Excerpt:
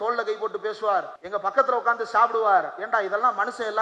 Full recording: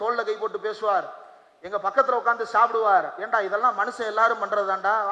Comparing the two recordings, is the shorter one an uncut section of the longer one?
no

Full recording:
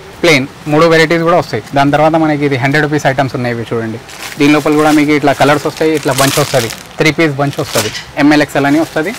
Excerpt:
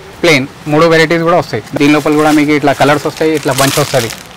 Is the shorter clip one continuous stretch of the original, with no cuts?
no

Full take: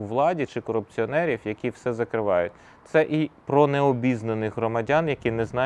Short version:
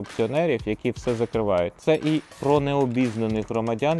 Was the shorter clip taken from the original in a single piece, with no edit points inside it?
no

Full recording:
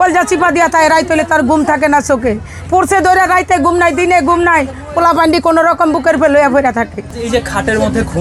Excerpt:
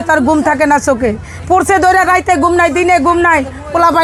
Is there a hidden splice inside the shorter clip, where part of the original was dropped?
no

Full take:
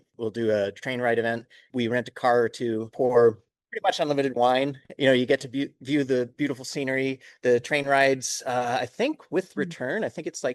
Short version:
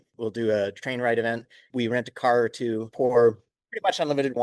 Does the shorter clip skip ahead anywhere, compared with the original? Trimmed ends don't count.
no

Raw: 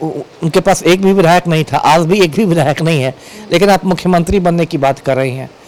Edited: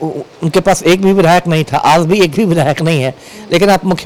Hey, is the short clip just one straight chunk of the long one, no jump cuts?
yes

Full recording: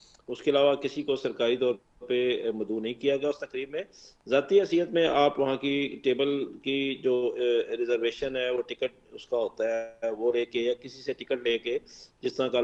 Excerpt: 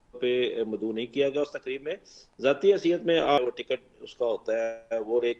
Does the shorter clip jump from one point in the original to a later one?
yes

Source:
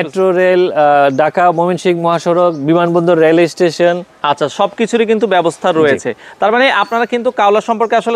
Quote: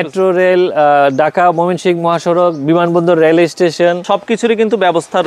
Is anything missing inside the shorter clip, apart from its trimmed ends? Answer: yes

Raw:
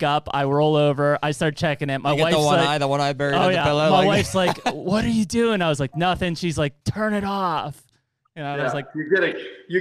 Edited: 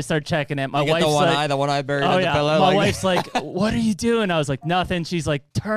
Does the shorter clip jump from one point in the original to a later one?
no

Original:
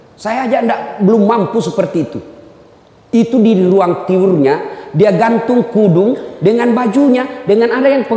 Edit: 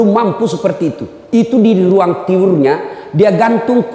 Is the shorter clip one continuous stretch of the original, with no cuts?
no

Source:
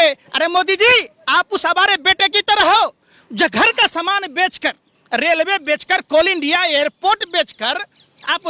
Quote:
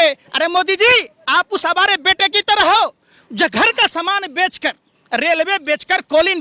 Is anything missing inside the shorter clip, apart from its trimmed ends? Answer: no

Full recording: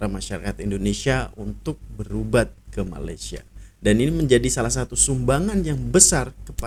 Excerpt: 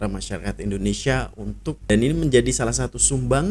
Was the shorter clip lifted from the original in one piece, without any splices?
no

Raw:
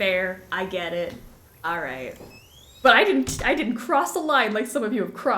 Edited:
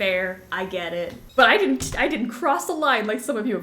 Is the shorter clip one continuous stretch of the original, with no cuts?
no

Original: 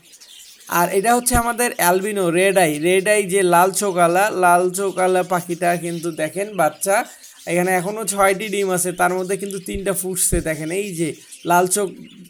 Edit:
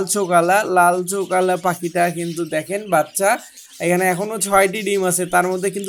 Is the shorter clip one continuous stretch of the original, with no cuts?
yes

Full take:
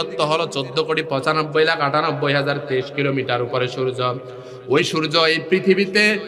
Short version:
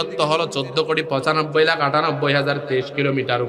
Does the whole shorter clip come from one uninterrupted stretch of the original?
yes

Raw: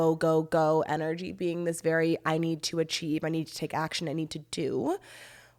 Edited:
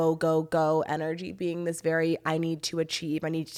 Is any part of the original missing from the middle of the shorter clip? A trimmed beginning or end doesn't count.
no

